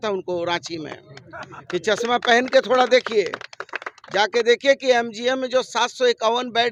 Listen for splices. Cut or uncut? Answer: uncut